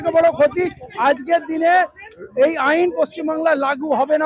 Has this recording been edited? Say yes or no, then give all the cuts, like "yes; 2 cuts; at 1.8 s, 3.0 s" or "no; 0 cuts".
no; 0 cuts